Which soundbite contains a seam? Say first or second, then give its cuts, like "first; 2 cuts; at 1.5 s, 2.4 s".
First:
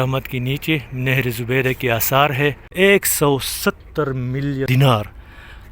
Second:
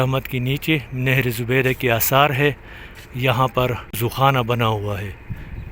first; 2 cuts; at 2.6 s, 4.7 s